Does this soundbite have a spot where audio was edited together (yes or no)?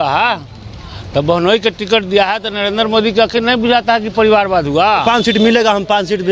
yes